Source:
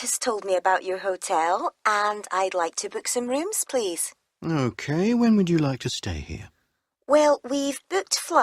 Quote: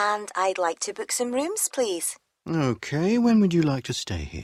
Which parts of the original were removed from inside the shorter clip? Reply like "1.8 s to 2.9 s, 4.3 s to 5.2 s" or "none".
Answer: none